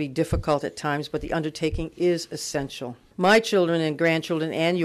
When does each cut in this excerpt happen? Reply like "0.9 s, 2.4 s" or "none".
none